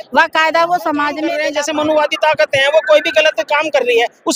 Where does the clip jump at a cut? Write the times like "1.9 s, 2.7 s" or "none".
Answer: 1.4 s